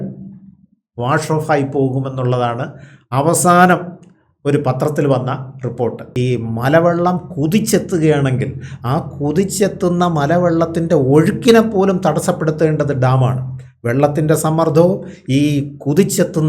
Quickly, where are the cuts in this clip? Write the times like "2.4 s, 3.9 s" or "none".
6.0 s